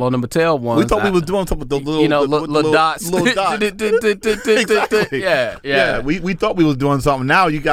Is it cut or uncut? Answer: uncut